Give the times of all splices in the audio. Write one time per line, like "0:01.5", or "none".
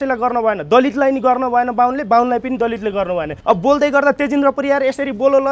0:03.4